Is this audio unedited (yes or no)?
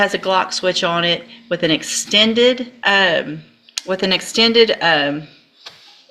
no